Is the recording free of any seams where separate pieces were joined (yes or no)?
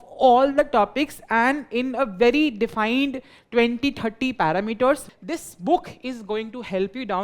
no